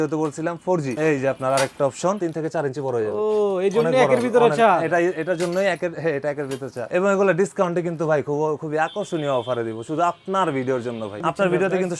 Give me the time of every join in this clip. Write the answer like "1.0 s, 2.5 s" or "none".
0.9 s, 2.2 s, 6.9 s, 11.2 s